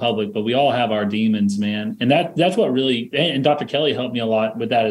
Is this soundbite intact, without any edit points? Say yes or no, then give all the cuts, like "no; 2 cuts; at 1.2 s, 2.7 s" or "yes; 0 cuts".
yes; 0 cuts